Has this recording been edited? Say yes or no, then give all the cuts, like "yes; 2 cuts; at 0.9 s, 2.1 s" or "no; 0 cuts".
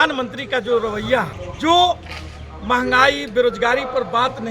yes; 1 cut; at 1.4 s